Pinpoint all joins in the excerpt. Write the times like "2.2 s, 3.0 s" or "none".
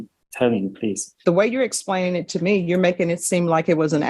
1.1 s